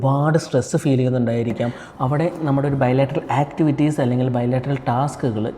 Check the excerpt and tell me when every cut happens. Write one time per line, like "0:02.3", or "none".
0:01.8